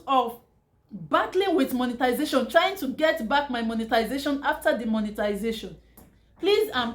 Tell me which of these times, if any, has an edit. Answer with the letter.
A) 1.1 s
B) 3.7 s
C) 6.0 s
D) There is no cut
C